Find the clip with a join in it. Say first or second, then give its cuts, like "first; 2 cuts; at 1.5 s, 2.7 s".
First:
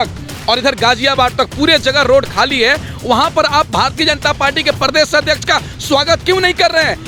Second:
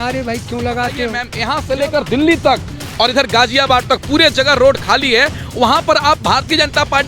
second; 1 cut; at 1.3 s